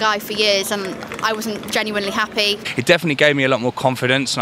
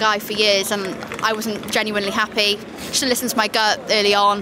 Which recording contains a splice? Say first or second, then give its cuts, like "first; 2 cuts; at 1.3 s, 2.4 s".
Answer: first; 1 cut; at 2.6 s